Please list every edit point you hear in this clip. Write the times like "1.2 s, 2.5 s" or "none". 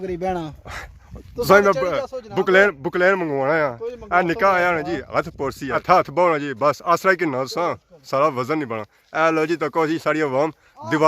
5.8 s